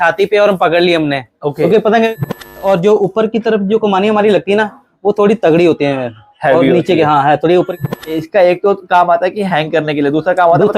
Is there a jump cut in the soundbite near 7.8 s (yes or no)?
yes